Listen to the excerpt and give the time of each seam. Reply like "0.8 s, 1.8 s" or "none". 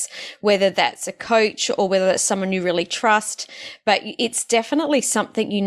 none